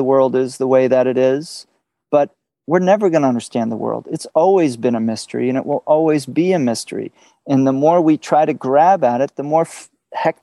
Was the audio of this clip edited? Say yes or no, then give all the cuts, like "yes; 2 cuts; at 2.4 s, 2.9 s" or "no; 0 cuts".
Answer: yes; 1 cut; at 2.5 s